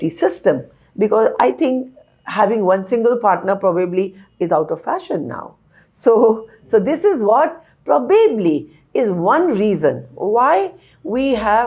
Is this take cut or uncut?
uncut